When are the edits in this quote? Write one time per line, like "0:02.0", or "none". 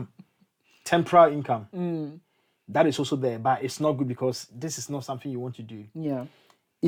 none